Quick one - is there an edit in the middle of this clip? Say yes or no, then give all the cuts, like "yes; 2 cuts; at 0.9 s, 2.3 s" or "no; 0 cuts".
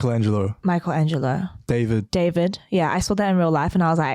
yes; 1 cut; at 1.5 s